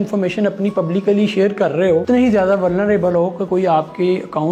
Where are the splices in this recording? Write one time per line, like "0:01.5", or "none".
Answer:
0:02.0